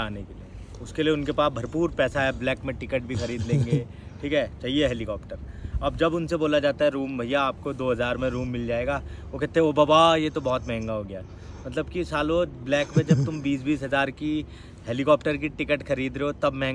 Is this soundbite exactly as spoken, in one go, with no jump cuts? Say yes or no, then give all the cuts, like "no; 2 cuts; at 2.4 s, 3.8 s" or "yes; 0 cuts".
yes; 0 cuts